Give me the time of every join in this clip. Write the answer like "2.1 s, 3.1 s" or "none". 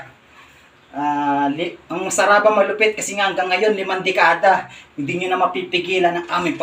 none